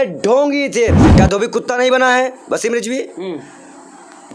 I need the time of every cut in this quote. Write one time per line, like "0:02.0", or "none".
0:01.0